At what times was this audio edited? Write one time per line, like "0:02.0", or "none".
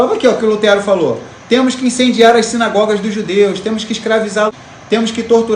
0:04.6